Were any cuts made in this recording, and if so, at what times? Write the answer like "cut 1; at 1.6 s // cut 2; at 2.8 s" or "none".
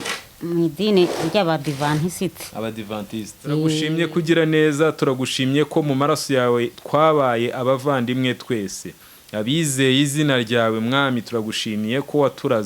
cut 1; at 3.9 s